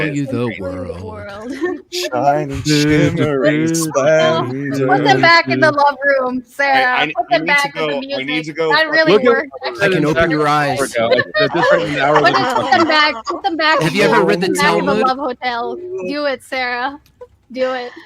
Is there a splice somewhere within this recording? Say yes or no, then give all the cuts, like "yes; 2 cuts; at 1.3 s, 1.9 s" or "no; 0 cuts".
no; 0 cuts